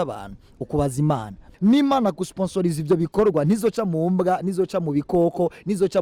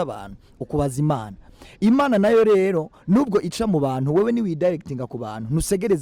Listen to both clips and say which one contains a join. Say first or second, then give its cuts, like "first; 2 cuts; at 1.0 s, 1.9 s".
first; 1 cut; at 1.5 s